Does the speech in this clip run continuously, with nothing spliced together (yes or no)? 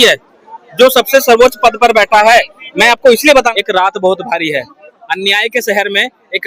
no